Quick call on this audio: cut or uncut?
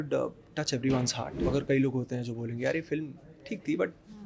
cut